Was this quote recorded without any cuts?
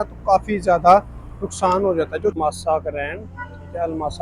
no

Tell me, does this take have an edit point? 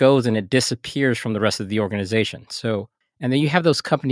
yes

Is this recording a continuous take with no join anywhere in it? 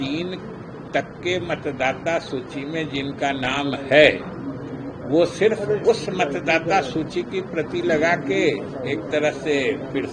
yes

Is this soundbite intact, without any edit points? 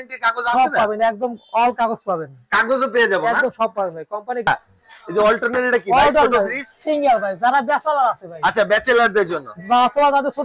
no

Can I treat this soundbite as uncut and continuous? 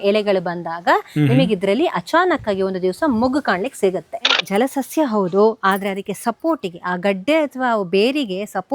no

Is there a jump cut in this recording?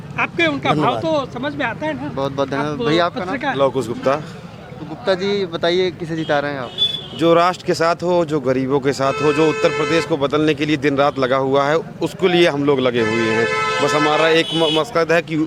no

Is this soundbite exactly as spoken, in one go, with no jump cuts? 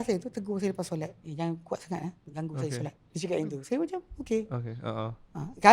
no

